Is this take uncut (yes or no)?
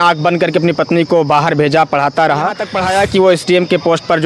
no